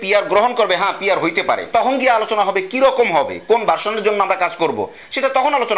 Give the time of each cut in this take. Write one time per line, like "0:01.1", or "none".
none